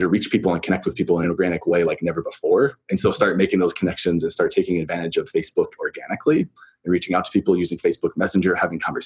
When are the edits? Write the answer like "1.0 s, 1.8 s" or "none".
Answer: 1.2 s